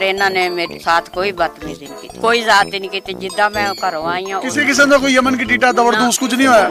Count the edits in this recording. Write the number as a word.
zero